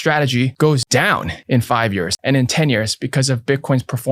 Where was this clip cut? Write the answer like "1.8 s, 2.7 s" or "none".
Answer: 1.0 s, 2.1 s